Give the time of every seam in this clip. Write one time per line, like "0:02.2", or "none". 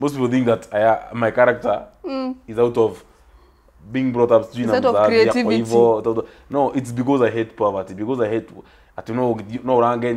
none